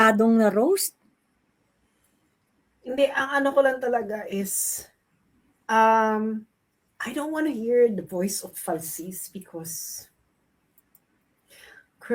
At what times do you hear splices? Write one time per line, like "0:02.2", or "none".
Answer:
none